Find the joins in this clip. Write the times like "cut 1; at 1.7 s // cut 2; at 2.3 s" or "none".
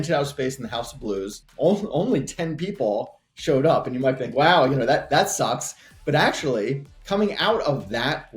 cut 1; at 1.4 s